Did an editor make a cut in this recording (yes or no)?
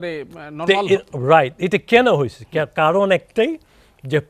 no